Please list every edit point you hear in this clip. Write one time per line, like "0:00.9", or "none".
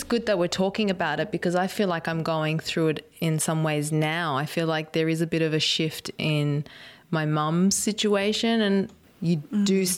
0:09.0